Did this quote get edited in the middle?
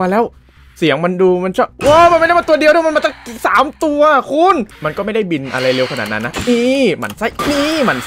yes; 1 cut; at 4.8 s

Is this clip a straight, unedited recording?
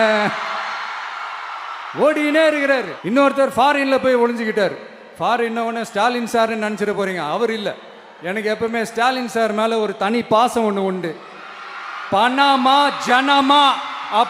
no; 2 cuts; at 2.9 s, 11.9 s

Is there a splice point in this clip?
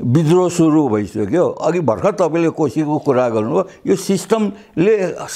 no; 0 cuts

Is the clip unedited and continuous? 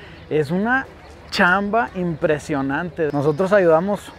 no; 1 cut; at 3.1 s

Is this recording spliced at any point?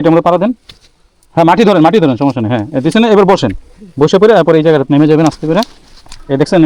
no; 0 cuts

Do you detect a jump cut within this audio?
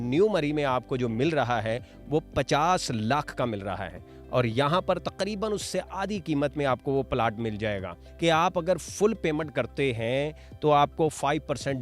yes; 1 cut; at 8.0 s

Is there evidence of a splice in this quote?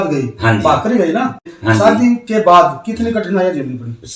yes; 1 cut; at 1.5 s

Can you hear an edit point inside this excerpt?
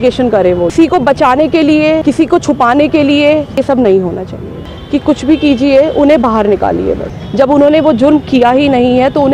yes; 5 cuts; at 0.7 s, 2.0 s, 3.6 s, 4.6 s, 7.2 s

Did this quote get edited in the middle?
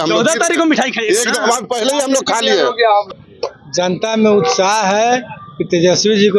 yes; 1 cut; at 3.1 s

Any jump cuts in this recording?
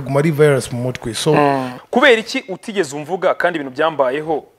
yes; 1 cut; at 1.7 s

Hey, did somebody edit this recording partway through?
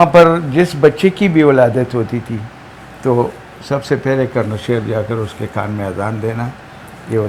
no; 0 cuts

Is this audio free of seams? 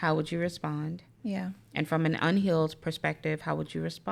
yes; 0 cuts

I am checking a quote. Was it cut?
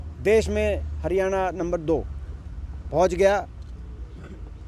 no; 0 cuts

